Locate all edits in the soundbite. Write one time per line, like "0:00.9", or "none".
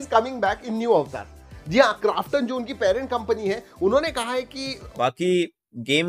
0:04.9